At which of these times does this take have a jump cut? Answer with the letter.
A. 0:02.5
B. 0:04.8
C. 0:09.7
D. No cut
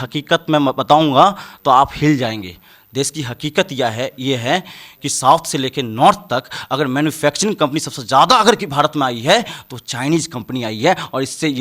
D